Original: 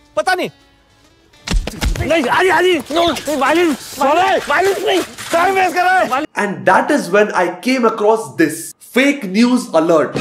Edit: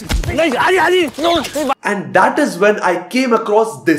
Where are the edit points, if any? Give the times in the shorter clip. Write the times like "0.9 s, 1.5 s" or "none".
1.7 s

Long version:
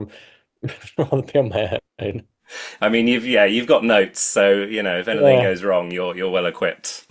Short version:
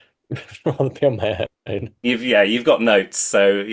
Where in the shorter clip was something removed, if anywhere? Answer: 2.1 s

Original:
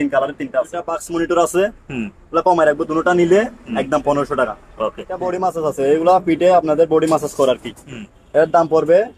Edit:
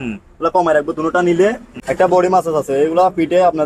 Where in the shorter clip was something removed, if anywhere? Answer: 1.9 s

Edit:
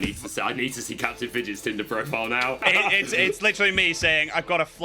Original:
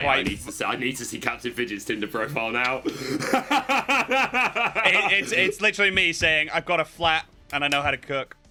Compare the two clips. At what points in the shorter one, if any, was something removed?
2.6 s

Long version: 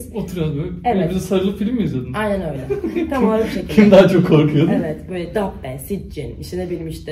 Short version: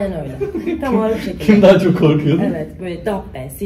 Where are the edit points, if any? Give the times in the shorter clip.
none

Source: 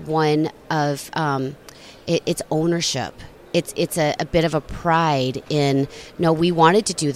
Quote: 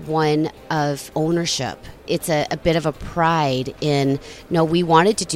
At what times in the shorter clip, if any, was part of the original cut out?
1.1 s, 2.0 s

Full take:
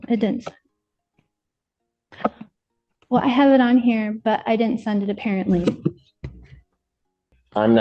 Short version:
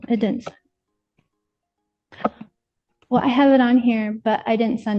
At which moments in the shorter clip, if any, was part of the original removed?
none

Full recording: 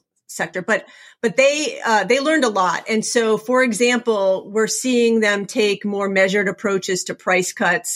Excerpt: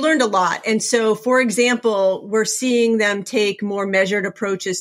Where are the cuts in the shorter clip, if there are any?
none

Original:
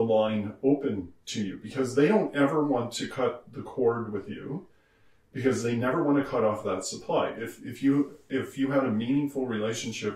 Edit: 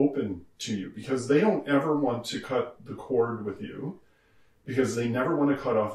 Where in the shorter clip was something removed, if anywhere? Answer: none

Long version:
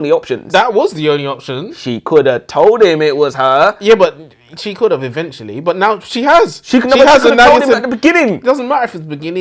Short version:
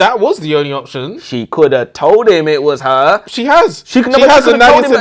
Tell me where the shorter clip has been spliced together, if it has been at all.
3.2 s

